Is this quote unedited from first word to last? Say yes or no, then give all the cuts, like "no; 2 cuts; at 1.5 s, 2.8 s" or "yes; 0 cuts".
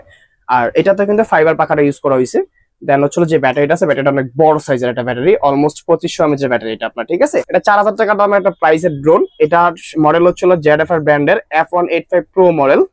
no; 1 cut; at 7.4 s